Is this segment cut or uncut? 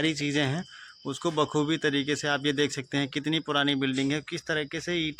uncut